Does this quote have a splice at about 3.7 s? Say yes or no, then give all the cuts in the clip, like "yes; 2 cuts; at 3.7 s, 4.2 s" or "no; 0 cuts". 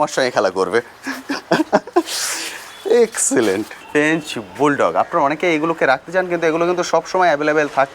yes; 1 cut; at 3.7 s